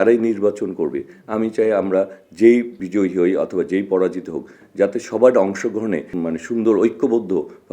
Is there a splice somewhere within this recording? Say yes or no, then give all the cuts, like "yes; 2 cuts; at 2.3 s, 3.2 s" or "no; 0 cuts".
yes; 2 cuts; at 2.7 s, 6.1 s